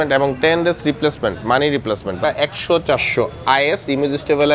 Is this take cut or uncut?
cut